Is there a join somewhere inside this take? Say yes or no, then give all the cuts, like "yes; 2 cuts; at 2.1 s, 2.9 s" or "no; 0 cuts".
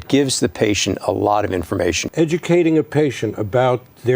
yes; 1 cut; at 2.0 s